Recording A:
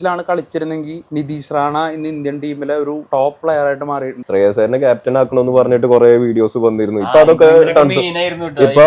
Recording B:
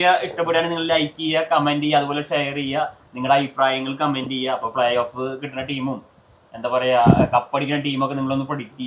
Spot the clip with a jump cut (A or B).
A